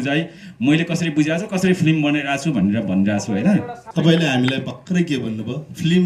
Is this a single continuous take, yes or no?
no